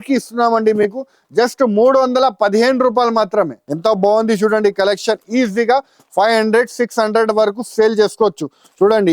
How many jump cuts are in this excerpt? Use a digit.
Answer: 1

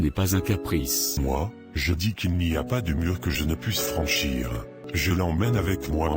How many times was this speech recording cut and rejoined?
2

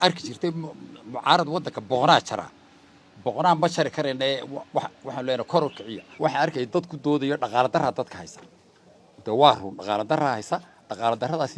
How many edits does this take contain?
1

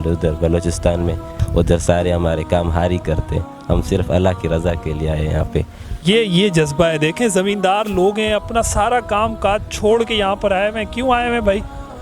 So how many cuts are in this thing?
2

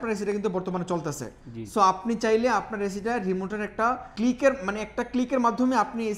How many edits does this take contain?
1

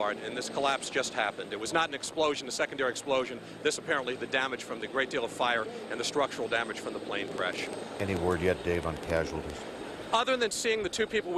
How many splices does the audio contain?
1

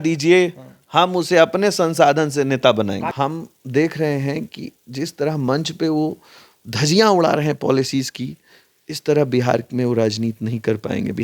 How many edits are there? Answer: 1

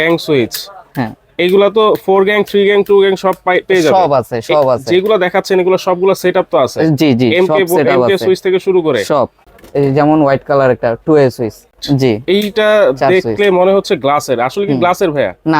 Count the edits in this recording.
2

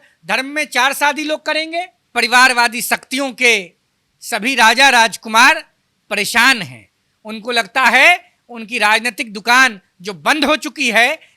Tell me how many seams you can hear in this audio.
1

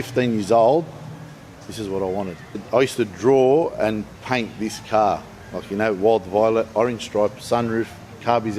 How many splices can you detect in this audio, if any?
2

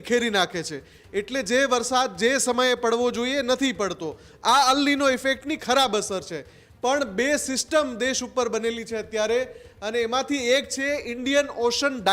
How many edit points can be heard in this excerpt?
0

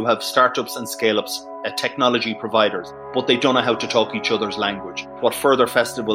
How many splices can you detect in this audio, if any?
2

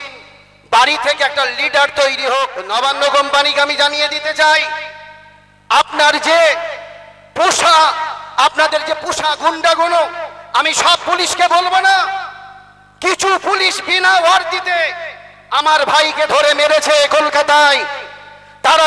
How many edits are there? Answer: 1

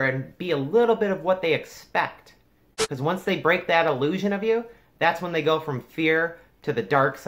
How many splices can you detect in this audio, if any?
1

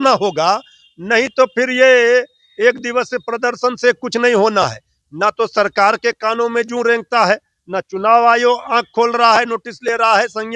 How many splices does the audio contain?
0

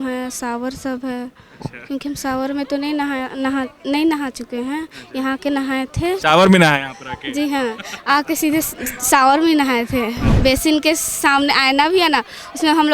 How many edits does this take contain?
1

